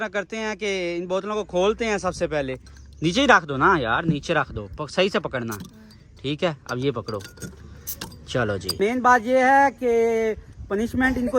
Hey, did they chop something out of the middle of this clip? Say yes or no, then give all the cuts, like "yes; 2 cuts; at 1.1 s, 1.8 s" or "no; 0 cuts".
yes; 1 cut; at 8.7 s